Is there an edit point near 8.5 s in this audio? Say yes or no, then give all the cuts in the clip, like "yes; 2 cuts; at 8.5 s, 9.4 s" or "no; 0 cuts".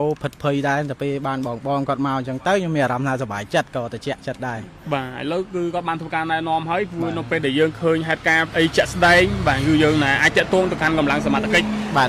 yes; 1 cut; at 8.5 s